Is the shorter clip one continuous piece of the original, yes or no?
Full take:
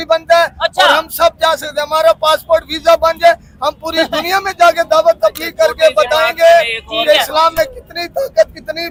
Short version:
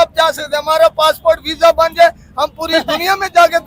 yes